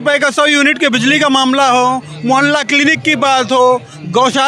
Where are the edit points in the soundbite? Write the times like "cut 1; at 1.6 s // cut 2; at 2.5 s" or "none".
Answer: none